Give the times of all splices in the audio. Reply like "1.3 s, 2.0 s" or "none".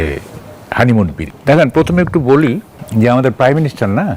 1.2 s, 2.7 s